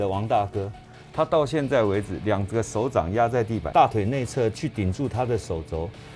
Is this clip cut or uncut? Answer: cut